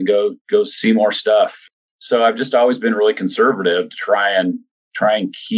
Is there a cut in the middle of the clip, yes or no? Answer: yes